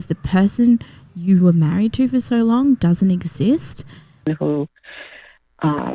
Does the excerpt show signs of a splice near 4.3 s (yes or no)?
yes